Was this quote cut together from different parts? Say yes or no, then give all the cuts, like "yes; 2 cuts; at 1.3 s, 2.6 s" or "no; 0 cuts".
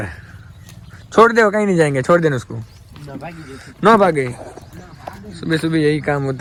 no; 0 cuts